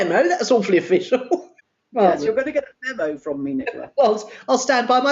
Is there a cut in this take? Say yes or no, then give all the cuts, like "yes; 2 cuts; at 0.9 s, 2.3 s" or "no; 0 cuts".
yes; 1 cut; at 1.6 s